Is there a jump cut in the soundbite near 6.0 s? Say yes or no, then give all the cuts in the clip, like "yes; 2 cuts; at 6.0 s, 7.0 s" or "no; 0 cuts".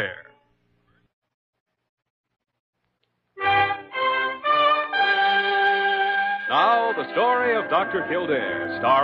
yes; 1 cut; at 6.0 s